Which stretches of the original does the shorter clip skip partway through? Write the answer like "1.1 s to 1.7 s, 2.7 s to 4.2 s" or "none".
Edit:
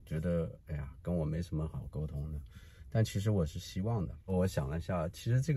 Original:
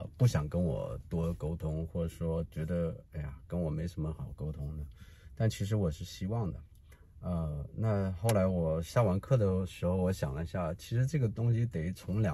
6.8 s to 10.0 s